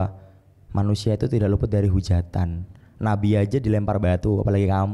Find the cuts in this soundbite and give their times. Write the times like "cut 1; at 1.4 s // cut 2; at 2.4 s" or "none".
none

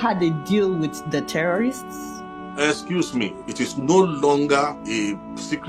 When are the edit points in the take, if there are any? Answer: cut 1; at 3.4 s // cut 2; at 4.8 s

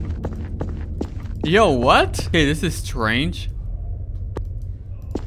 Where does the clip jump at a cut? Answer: cut 1; at 2.3 s

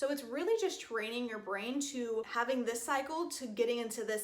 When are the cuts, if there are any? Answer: cut 1; at 2.3 s

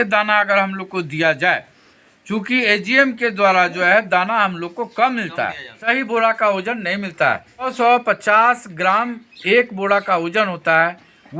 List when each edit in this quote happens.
cut 1; at 5.9 s // cut 2; at 7.7 s

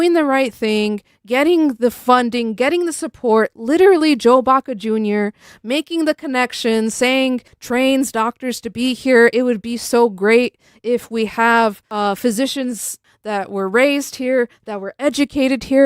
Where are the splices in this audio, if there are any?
cut 1; at 7.5 s // cut 2; at 11.8 s // cut 3; at 13.1 s

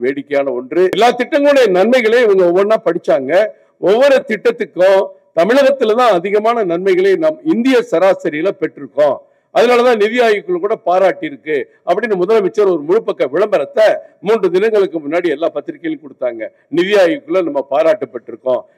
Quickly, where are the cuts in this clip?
cut 1; at 0.9 s

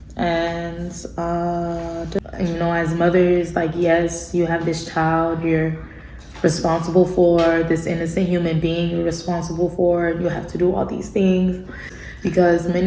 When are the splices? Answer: cut 1; at 2.3 s // cut 2; at 11.9 s

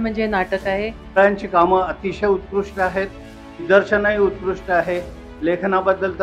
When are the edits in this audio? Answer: cut 1; at 1.0 s // cut 2; at 3.6 s

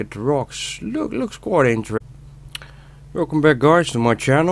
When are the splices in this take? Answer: none

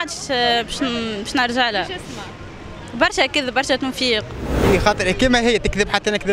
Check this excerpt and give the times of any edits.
cut 1; at 4.7 s

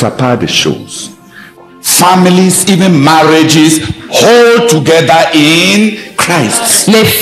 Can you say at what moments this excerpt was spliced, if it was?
cut 1; at 1.5 s

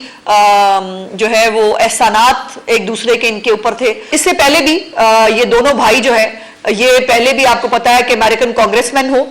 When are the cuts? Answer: cut 1; at 4.1 s

